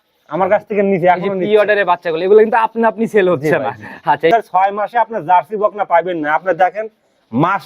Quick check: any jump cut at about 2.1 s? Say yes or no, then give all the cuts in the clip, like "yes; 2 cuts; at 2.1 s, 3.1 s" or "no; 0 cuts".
no; 1 cut; at 4.3 s